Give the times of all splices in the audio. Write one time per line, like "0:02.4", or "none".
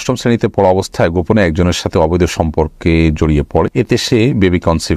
0:03.7